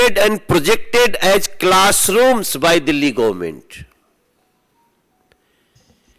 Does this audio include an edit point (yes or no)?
no